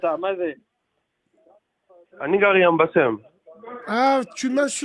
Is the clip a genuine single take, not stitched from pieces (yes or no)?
yes